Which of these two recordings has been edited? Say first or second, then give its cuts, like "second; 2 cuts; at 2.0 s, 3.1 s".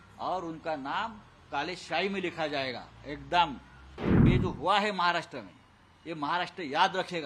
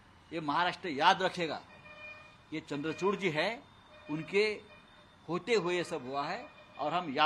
first; 1 cut; at 4.2 s